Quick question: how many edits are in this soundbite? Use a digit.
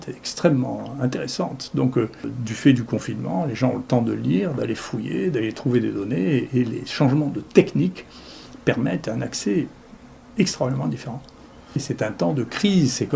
2